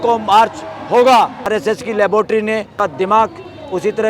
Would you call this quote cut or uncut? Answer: cut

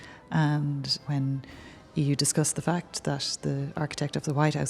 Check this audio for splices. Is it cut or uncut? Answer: cut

